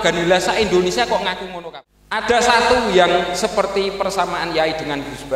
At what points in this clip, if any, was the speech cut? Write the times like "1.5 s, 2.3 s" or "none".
1.5 s